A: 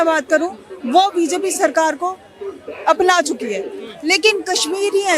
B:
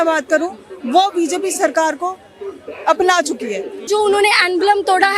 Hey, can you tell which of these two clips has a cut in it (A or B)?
B